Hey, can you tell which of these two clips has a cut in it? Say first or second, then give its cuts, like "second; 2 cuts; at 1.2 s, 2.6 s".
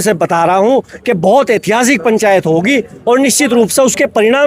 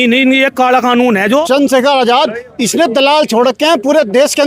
second; 1 cut; at 1.4 s